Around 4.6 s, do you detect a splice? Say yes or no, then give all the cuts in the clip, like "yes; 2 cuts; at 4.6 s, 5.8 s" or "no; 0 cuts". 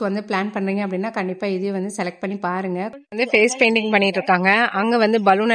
no; 1 cut; at 2.9 s